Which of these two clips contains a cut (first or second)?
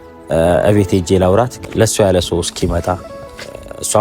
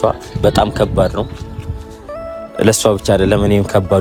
first